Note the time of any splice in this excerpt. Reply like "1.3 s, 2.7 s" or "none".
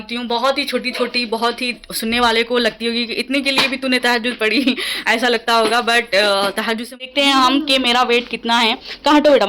7.0 s